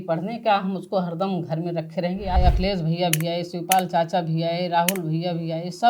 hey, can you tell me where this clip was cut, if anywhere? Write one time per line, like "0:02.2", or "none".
0:02.4